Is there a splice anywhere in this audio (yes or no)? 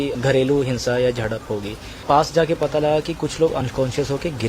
yes